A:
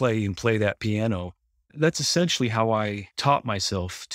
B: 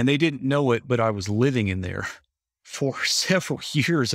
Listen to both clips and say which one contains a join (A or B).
A